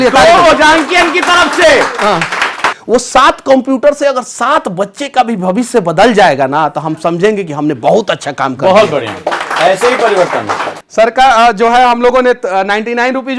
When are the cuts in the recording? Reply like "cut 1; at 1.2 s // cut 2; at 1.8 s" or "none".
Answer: cut 1; at 2.7 s // cut 2; at 10.8 s